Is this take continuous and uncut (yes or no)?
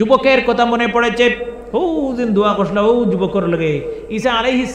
yes